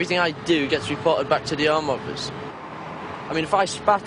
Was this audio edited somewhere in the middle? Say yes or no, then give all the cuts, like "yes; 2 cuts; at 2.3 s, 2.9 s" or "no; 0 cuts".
no; 0 cuts